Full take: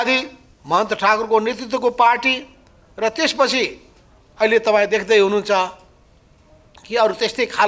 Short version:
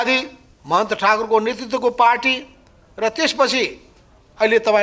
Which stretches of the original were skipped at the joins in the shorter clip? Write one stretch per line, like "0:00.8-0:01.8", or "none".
none